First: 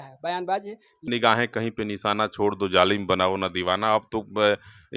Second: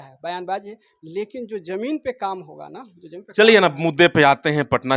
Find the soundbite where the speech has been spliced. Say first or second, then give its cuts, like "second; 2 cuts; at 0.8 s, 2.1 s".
first; 1 cut; at 1.0 s